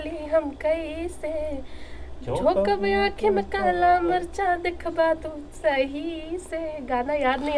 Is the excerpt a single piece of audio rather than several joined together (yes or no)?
yes